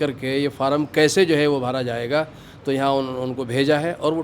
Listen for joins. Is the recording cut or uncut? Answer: uncut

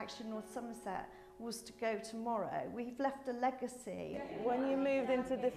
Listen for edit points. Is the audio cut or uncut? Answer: cut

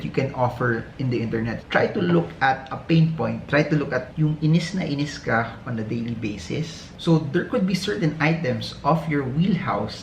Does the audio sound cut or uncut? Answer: cut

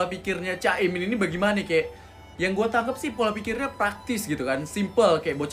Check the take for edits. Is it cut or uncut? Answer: uncut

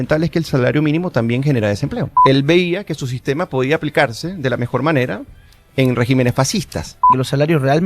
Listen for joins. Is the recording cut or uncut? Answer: cut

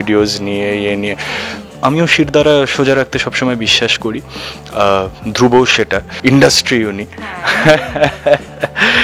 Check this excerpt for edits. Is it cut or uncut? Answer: cut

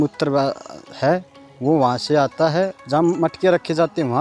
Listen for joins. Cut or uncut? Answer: cut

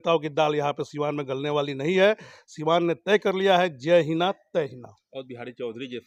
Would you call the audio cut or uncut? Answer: uncut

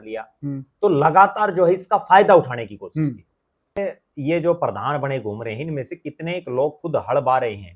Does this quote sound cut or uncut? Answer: cut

